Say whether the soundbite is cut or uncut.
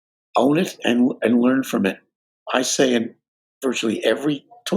uncut